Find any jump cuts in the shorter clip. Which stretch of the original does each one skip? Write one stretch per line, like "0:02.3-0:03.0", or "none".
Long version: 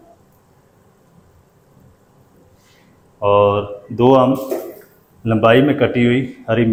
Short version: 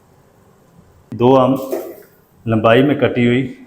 0:01.4-0:03.8